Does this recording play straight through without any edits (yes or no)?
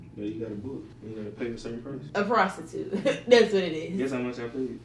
no